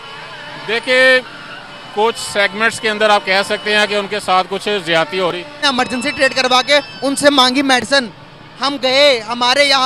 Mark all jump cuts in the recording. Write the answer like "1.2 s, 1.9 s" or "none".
5.6 s